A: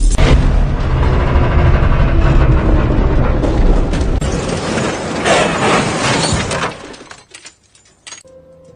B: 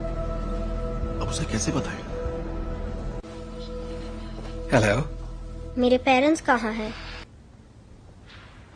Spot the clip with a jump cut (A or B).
B